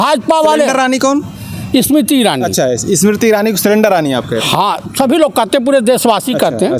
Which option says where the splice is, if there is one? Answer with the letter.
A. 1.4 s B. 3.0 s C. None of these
C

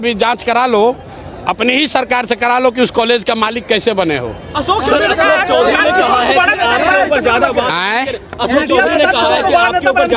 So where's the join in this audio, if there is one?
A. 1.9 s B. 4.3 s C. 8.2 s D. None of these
D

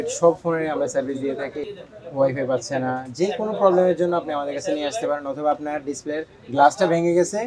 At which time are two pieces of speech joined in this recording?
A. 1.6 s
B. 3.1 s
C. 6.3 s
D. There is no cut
A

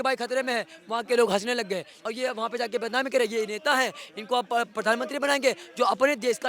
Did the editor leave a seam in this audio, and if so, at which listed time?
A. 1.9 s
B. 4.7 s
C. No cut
A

